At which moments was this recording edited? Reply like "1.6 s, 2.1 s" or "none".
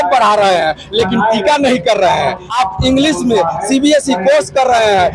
2.4 s